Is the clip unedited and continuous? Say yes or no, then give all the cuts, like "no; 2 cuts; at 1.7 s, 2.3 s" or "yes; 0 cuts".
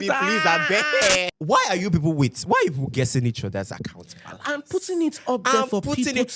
no; 1 cut; at 1.3 s